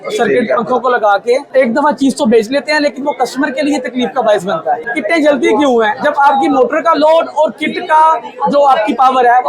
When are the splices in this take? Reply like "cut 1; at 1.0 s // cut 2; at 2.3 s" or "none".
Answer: cut 1; at 1.5 s // cut 2; at 4.8 s // cut 3; at 5.9 s